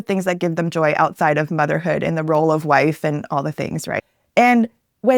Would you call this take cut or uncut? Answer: cut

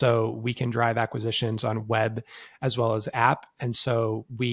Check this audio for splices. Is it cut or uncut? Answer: uncut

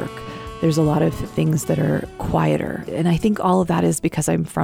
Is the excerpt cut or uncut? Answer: uncut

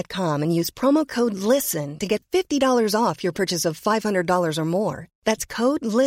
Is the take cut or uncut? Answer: uncut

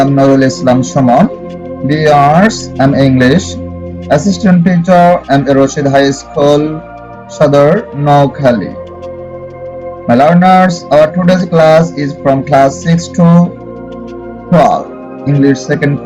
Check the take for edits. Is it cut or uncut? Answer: uncut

